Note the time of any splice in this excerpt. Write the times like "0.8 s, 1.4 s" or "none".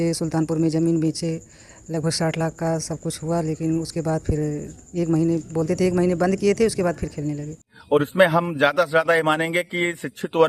7.7 s